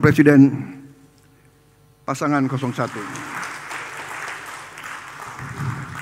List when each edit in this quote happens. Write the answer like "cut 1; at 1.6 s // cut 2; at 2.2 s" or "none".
cut 1; at 3.2 s